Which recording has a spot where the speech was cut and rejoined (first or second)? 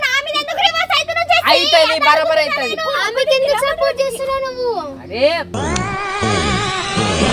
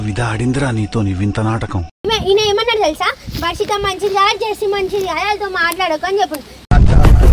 second